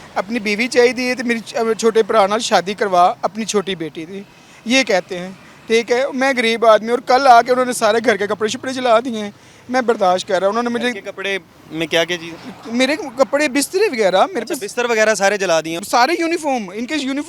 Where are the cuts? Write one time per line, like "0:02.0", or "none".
none